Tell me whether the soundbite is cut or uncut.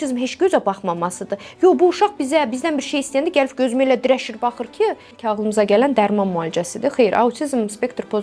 cut